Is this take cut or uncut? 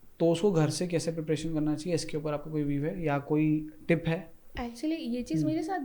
uncut